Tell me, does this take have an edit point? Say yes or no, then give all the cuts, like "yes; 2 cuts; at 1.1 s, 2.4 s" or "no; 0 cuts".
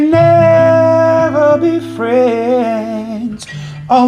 no; 0 cuts